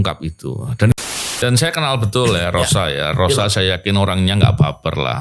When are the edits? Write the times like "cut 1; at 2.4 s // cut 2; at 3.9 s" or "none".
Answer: cut 1; at 0.9 s